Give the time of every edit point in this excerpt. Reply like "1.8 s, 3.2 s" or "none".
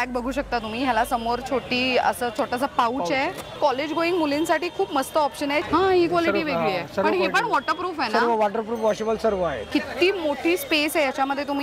3.6 s, 5.6 s, 9.7 s